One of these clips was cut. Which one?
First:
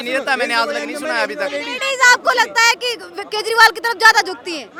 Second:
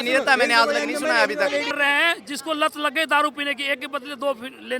second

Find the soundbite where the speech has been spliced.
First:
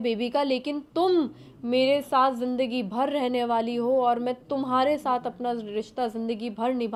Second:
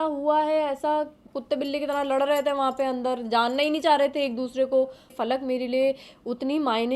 second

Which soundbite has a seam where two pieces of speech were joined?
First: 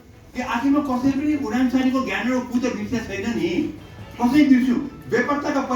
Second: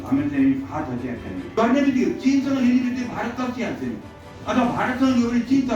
second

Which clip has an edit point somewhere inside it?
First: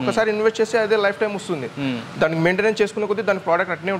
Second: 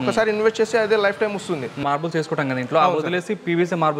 second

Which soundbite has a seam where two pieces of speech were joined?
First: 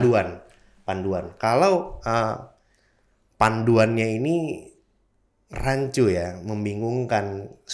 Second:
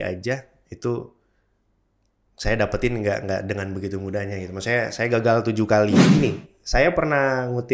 second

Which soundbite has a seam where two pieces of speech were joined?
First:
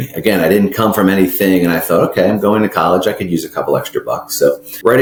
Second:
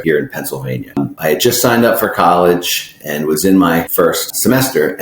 second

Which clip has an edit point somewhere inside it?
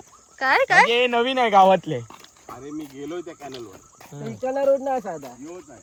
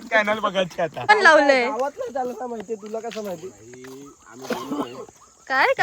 second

